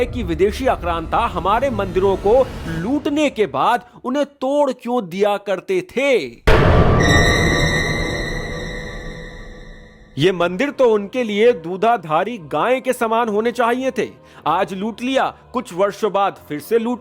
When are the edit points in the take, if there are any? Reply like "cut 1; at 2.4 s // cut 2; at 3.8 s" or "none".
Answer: none